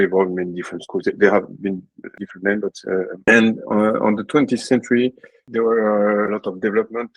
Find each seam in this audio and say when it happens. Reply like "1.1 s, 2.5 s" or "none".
5.4 s, 6.3 s